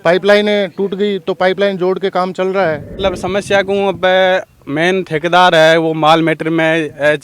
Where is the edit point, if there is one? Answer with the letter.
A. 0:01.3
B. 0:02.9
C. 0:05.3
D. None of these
B